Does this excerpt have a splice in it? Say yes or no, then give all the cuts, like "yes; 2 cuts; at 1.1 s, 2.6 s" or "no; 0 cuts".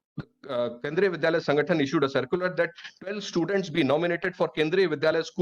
no; 0 cuts